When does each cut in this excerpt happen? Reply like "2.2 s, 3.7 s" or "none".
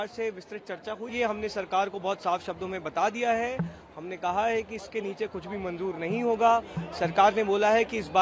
1.1 s